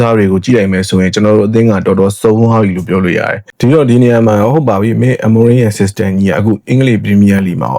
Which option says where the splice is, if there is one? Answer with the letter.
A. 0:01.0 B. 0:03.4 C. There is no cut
B